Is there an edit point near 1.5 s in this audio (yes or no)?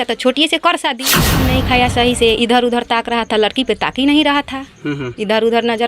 yes